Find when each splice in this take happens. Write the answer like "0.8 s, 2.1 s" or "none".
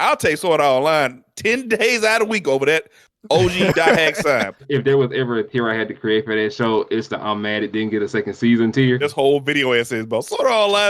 4.6 s, 9.0 s